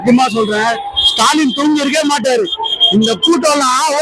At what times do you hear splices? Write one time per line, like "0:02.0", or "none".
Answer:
none